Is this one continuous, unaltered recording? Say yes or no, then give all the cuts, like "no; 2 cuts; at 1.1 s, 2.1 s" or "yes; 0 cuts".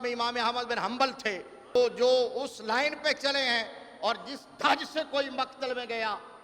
no; 1 cut; at 1.8 s